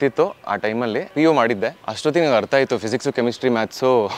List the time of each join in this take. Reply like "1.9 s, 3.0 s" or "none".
1.1 s, 1.9 s